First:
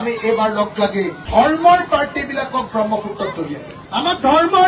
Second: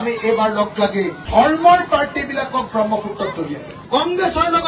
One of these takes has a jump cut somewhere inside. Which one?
second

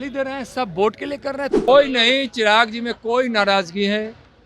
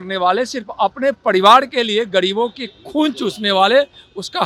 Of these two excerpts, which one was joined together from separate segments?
first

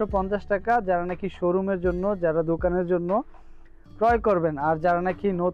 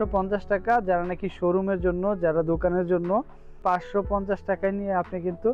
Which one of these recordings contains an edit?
second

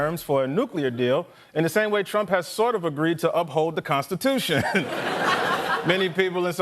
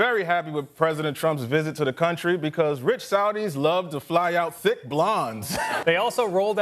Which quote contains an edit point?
second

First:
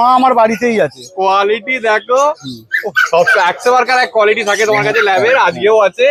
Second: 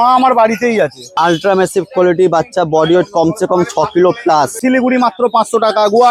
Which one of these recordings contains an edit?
second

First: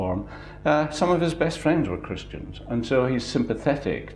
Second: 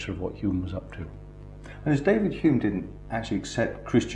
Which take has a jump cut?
first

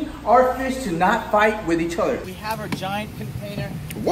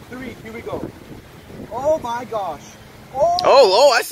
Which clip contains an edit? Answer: first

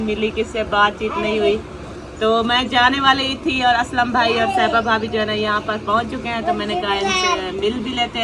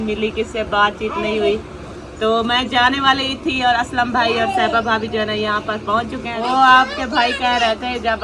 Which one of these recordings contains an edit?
second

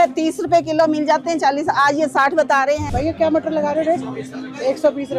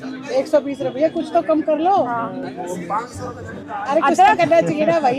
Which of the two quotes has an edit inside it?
first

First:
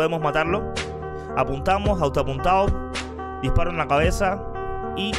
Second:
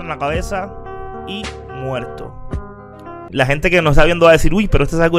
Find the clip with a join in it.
second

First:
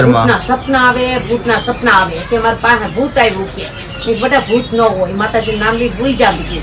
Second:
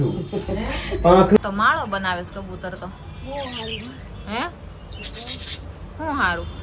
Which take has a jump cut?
second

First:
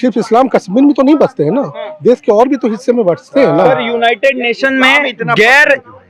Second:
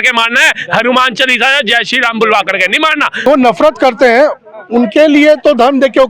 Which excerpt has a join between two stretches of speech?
second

